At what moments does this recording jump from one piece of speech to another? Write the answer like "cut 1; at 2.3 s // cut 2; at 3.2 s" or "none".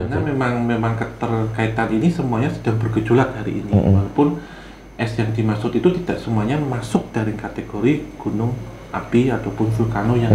none